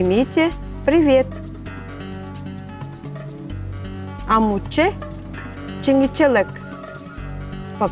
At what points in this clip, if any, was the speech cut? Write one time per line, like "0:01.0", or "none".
0:01.4
0:04.3